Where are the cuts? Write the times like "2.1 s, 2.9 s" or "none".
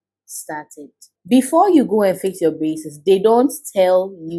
1.1 s